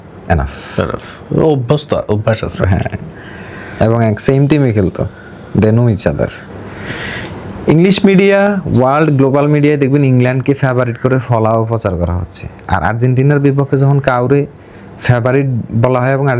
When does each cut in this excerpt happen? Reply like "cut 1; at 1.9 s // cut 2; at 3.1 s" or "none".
cut 1; at 6.4 s